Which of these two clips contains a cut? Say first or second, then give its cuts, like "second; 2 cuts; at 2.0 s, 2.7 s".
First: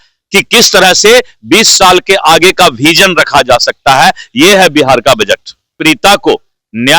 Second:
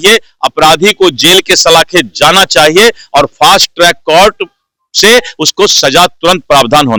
first; 1 cut; at 5.7 s